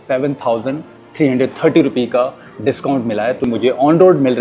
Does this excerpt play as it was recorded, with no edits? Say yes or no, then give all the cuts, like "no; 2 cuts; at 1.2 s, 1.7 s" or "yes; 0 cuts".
no; 1 cut; at 3.4 s